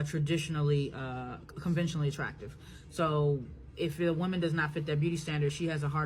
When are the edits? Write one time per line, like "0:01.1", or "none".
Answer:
0:03.1